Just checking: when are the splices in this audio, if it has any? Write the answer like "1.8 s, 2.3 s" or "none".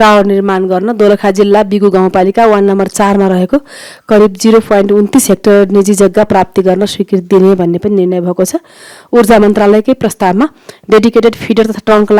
none